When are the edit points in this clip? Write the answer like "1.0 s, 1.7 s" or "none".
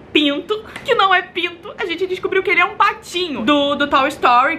3.3 s